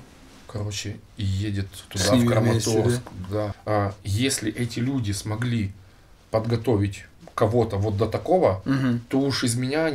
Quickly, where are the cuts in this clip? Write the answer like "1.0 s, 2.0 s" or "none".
3.6 s